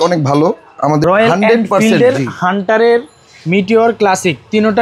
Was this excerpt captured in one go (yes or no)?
no